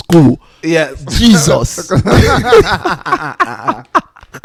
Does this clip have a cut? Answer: no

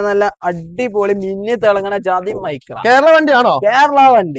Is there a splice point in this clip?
no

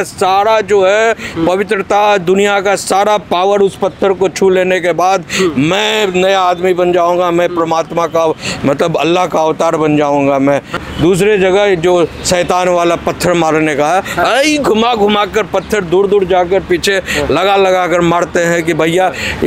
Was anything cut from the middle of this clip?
yes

